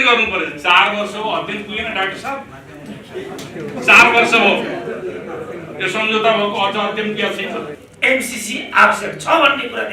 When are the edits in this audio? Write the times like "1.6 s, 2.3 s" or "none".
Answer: 7.8 s